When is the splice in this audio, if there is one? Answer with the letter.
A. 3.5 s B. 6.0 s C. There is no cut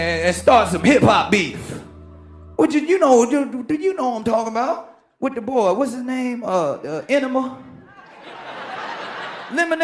A